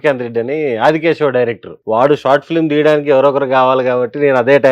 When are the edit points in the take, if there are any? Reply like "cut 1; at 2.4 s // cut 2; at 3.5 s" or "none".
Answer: cut 1; at 1.7 s